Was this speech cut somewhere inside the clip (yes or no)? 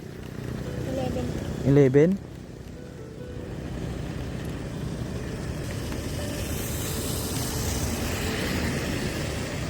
yes